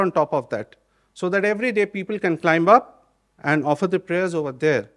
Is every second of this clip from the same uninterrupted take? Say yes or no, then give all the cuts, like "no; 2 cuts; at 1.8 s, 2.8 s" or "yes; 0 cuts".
yes; 0 cuts